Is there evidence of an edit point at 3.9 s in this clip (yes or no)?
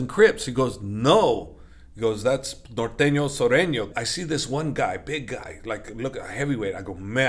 yes